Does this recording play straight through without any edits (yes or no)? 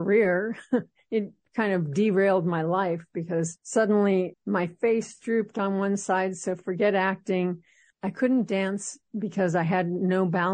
yes